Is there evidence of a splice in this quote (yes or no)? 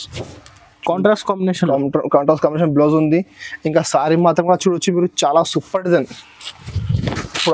no